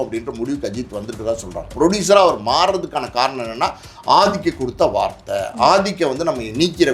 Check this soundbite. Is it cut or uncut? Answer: cut